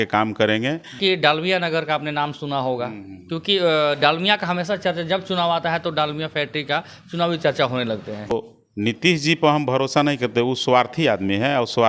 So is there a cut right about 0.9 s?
yes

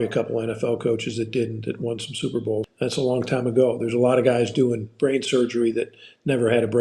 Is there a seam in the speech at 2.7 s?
yes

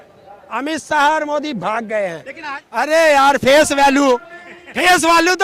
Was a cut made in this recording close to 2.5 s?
yes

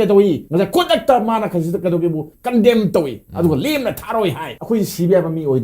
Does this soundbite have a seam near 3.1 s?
no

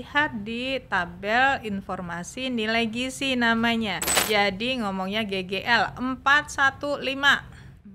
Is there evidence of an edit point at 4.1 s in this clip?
yes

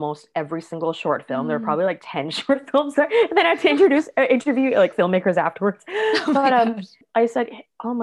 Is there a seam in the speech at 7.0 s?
yes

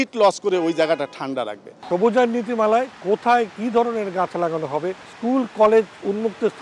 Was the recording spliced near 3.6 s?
no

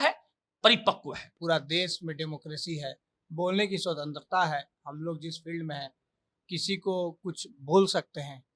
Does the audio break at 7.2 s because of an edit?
no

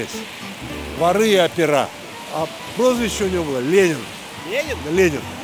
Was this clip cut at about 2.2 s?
yes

